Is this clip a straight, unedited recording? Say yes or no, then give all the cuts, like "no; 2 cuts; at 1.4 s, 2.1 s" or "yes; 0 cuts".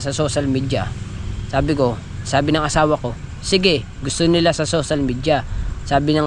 yes; 0 cuts